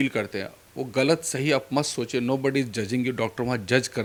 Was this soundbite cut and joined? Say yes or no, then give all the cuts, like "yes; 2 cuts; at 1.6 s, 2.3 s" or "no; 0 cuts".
no; 0 cuts